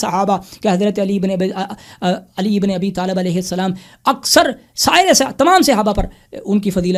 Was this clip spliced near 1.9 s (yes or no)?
no